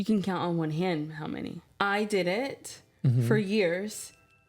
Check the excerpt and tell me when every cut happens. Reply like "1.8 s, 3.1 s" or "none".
1.7 s